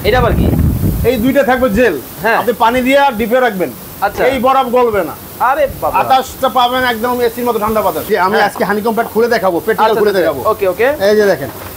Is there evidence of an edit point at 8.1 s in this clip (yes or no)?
yes